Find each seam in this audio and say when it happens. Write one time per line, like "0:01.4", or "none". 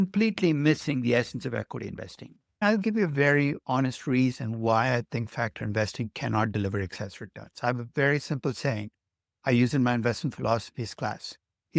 0:02.6